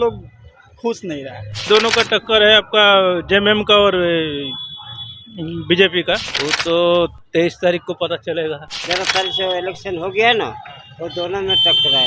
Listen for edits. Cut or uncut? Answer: cut